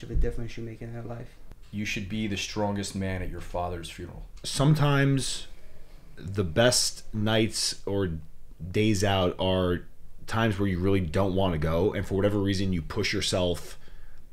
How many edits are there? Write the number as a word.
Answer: two